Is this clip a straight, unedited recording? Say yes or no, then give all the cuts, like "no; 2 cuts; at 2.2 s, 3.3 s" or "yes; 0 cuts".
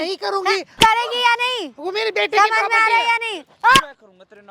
yes; 0 cuts